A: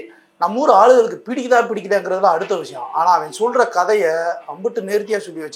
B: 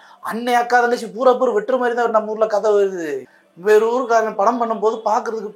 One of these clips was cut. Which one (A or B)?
B